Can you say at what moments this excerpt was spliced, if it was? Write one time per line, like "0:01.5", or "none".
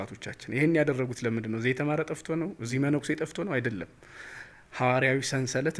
none